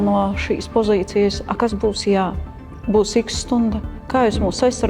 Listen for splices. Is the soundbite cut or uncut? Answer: uncut